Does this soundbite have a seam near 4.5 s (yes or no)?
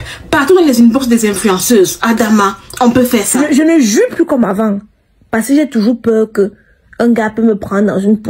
no